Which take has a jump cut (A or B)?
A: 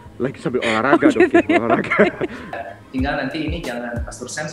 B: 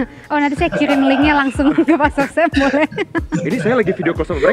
A